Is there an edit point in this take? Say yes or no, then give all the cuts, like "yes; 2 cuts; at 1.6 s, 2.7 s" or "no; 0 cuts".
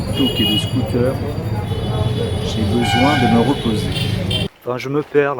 yes; 1 cut; at 4.4 s